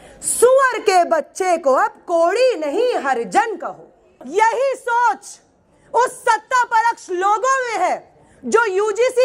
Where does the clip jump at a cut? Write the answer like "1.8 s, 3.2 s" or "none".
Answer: 4.2 s